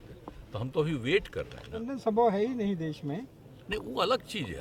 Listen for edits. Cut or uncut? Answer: cut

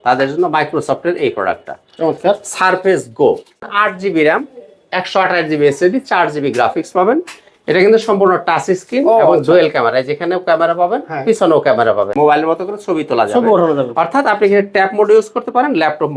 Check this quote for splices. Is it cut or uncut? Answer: cut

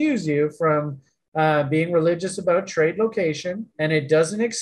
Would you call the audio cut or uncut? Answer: uncut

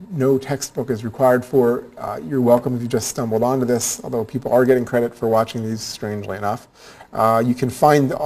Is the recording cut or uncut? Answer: cut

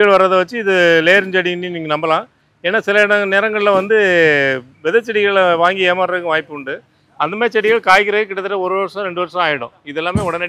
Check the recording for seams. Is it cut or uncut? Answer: uncut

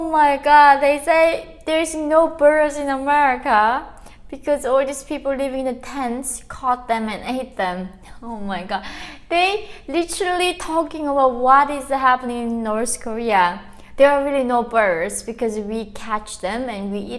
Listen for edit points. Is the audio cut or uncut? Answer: uncut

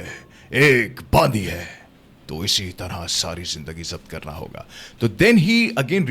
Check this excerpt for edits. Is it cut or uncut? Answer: uncut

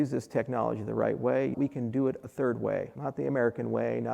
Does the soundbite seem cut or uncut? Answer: cut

